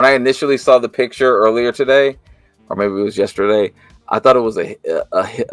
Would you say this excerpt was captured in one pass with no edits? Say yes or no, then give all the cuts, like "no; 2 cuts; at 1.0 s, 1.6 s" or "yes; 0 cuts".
yes; 0 cuts